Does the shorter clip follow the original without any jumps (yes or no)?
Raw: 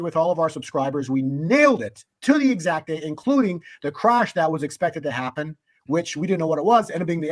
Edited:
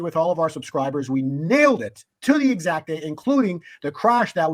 yes